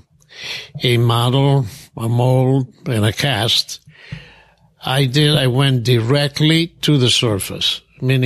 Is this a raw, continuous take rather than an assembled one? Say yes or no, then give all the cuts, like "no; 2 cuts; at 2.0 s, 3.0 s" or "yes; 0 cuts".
yes; 0 cuts